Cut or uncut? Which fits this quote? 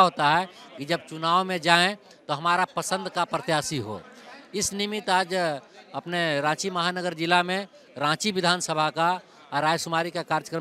uncut